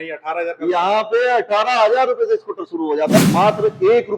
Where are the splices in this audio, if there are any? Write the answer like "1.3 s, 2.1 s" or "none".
3.2 s